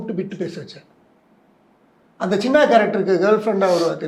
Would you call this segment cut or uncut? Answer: uncut